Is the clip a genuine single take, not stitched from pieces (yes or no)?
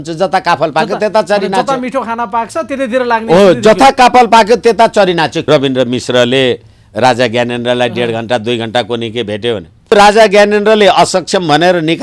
no